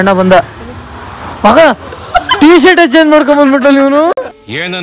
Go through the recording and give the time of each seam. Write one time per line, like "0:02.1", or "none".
none